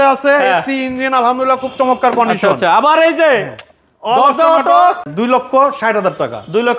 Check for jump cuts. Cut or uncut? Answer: cut